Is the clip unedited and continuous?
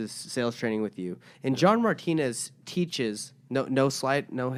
yes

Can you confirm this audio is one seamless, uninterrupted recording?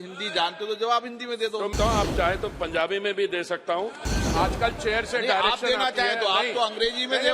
no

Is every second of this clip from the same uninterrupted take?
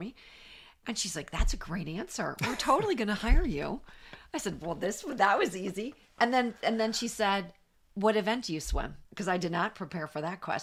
yes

